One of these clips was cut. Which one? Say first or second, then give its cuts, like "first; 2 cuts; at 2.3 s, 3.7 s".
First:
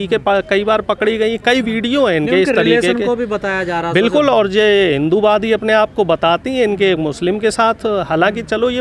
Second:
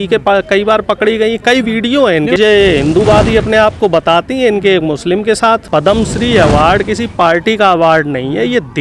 second; 2 cuts; at 2.4 s, 5.6 s